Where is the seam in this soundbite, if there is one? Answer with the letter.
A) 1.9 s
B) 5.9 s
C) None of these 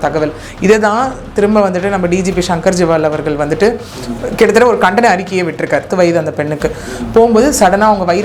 B